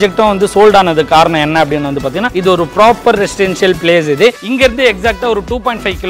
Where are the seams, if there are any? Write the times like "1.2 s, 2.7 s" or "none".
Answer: 2.3 s, 4.4 s